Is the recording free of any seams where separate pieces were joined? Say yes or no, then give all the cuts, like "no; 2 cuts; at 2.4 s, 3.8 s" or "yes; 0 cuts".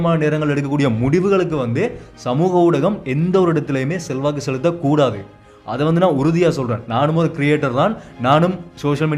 yes; 0 cuts